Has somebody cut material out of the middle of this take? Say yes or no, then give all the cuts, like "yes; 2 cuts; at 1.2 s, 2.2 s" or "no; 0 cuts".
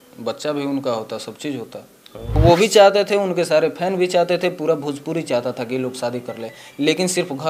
yes; 1 cut; at 2.4 s